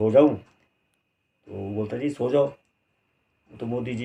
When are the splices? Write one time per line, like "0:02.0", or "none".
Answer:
none